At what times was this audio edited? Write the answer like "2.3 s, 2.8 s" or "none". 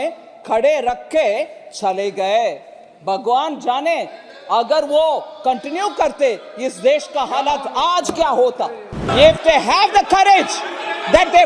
9.0 s